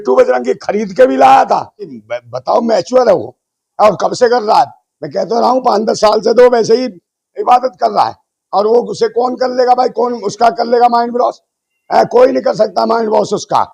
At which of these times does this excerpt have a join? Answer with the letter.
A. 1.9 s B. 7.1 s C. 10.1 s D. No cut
A